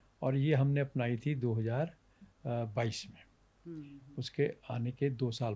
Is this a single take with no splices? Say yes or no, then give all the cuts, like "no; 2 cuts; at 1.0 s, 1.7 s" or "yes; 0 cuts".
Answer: yes; 0 cuts